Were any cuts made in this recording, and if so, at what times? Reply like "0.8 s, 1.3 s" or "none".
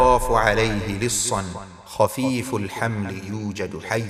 none